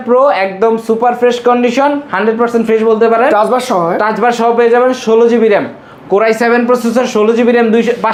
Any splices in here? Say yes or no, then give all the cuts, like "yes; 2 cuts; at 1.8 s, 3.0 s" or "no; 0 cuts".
no; 0 cuts